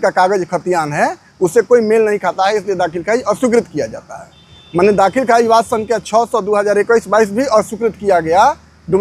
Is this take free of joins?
yes; 0 cuts

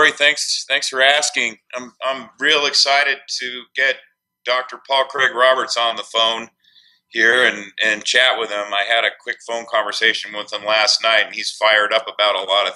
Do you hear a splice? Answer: yes; 1 cut; at 7.1 s

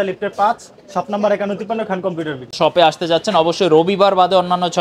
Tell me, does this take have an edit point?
yes; 1 cut; at 2.6 s

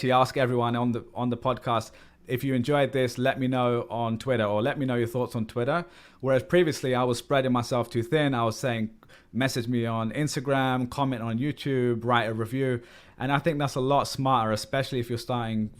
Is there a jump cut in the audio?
yes; 1 cut; at 13.0 s

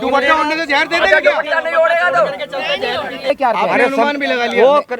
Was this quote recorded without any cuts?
no; 1 cut; at 3.3 s

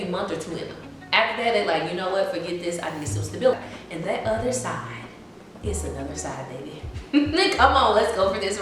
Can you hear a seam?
yes; 1 cut; at 3.5 s

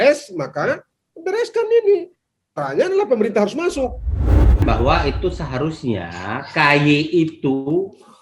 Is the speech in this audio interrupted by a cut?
yes; 1 cut; at 4.3 s

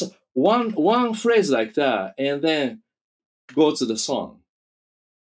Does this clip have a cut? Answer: no; 0 cuts

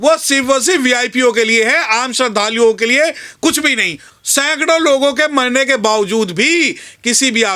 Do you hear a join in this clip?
yes; 1 cut; at 4.0 s

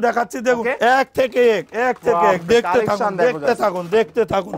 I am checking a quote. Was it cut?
no; 0 cuts

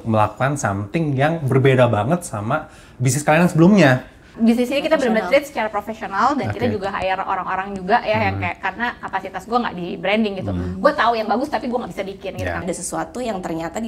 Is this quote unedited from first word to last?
no; 2 cuts; at 4.3 s, 12.6 s

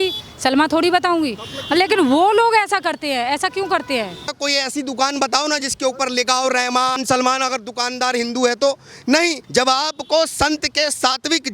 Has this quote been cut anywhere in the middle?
yes; 3 cuts; at 4.3 s, 7.0 s, 9.4 s

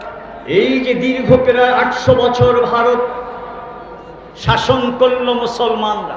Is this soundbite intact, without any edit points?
yes; 0 cuts

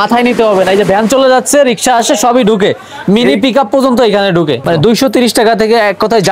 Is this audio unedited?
no; 1 cut; at 4.6 s

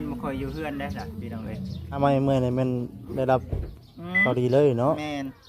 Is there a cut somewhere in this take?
yes; 1 cut; at 2.0 s

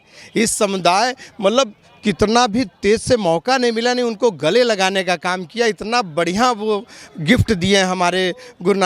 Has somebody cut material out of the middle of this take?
no; 0 cuts

